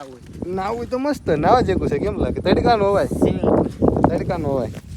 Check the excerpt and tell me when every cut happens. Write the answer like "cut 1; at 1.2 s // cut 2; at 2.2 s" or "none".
none